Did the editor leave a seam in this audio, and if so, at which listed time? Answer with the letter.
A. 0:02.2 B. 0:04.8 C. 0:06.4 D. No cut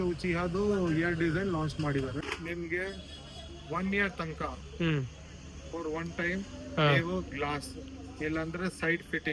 A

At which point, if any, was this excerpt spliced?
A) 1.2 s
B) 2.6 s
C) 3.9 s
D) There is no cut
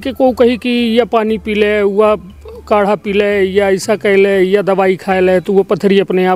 D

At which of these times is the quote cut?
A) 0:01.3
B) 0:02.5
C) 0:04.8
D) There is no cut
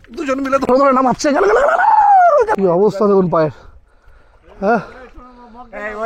B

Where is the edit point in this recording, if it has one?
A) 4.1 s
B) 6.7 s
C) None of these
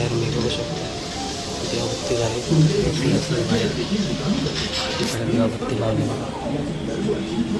C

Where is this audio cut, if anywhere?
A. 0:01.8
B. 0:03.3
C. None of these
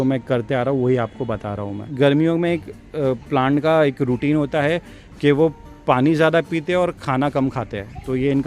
A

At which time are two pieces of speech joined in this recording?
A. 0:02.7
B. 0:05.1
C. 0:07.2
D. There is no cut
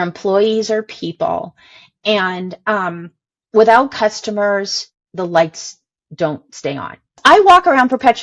C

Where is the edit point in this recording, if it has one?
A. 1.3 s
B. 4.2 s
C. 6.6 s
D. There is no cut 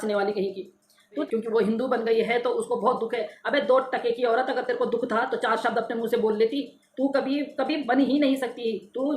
A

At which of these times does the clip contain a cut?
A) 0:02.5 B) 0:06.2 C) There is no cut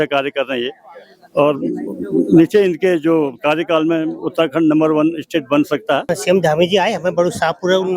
B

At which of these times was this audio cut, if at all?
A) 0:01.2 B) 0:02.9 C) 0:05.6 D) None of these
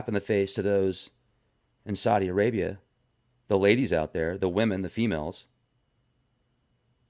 B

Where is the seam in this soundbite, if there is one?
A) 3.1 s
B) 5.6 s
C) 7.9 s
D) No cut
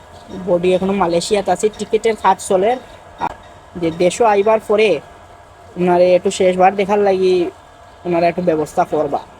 A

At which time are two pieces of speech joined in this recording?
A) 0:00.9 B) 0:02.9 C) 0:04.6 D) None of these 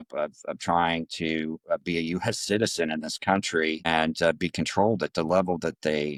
D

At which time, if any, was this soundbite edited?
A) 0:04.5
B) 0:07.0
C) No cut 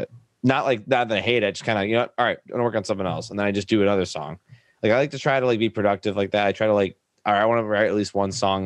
C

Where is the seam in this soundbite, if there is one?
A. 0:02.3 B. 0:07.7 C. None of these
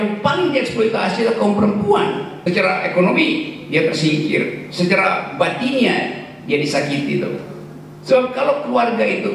A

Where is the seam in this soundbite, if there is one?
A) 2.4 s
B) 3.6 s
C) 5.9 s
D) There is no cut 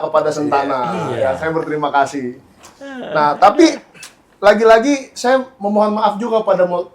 D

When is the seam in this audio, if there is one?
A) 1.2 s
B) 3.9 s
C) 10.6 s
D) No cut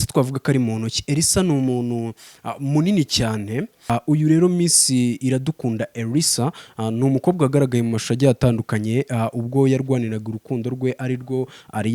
B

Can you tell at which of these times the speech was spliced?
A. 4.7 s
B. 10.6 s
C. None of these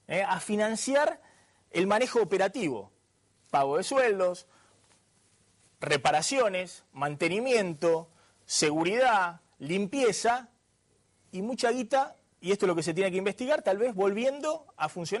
B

